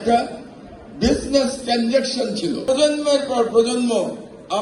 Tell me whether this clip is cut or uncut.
cut